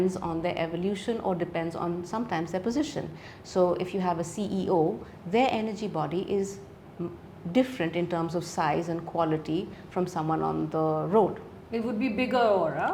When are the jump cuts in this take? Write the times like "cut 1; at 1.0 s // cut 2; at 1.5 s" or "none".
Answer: none